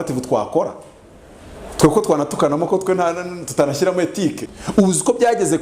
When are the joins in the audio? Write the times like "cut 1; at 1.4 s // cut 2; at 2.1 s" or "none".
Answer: cut 1; at 4.4 s